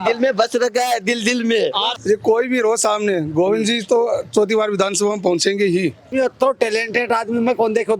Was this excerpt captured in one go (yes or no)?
no